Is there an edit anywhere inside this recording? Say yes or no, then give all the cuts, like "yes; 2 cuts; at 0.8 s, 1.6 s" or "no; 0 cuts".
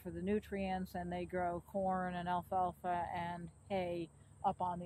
no; 0 cuts